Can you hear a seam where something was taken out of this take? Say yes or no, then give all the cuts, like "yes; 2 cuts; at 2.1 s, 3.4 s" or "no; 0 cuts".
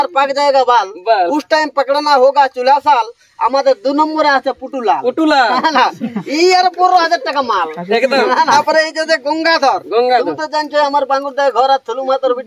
yes; 1 cut; at 8.5 s